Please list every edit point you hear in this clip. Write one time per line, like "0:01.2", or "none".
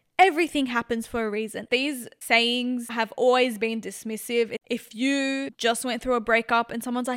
0:01.6
0:04.6
0:05.5